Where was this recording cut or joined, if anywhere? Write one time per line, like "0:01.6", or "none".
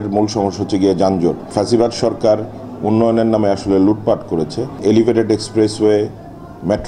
0:01.4
0:04.8